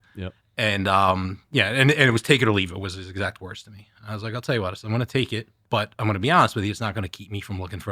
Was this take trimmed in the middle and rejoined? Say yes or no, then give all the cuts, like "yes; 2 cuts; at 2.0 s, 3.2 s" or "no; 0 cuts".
yes; 1 cut; at 5.5 s